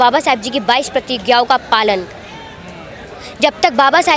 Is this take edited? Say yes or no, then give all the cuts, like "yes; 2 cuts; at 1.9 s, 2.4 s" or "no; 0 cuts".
no; 0 cuts